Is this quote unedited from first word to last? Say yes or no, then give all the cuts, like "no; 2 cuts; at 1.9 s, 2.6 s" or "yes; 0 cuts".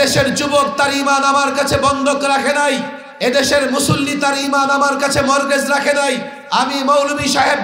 no; 2 cuts; at 3.0 s, 6.3 s